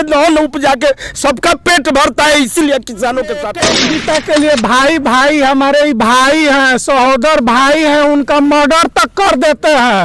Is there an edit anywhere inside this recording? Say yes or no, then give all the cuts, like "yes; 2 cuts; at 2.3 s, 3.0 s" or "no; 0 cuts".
yes; 1 cut; at 3.6 s